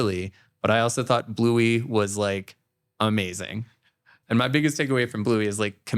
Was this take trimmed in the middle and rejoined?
yes; 1 cut; at 4.1 s

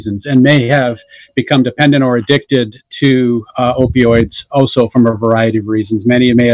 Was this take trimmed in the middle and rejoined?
no; 0 cuts

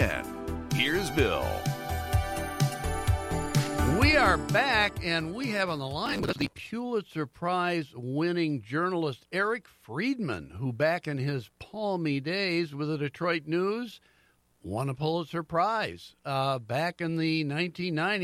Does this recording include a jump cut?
no; 0 cuts

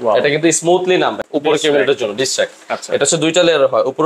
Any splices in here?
yes; 1 cut; at 1.2 s

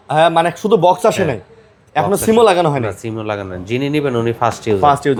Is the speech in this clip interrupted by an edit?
no; 0 cuts

